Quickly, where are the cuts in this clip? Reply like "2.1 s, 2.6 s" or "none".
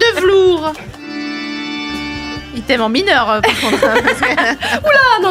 1.0 s